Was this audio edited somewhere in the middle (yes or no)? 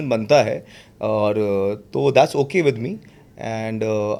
no